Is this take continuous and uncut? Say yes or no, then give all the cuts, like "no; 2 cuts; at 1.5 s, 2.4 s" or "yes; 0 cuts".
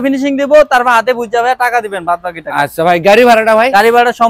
yes; 0 cuts